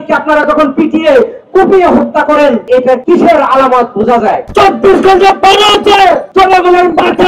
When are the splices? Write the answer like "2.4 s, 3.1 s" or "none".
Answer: 2.9 s, 4.4 s, 6.3 s